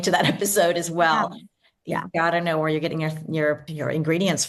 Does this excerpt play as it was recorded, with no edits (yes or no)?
yes